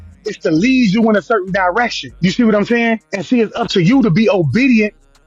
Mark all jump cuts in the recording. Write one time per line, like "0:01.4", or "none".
0:02.0
0:03.1